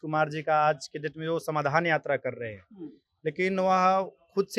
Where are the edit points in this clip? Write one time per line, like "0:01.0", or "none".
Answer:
none

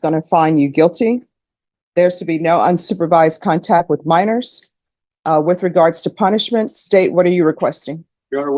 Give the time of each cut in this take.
none

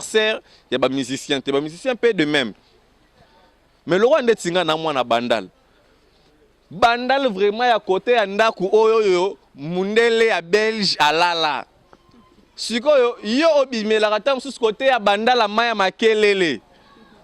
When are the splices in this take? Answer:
0:03.3

